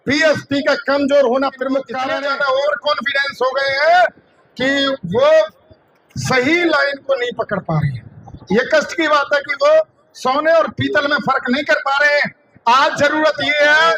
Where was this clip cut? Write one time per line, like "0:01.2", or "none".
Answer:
0:02.0